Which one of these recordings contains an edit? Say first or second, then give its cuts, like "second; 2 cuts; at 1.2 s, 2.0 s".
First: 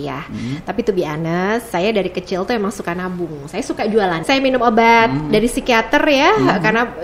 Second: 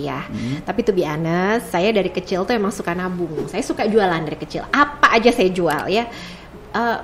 first; 1 cut; at 4.2 s